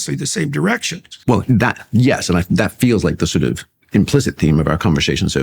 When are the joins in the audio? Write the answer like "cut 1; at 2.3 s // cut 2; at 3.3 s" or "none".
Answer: cut 1; at 1.1 s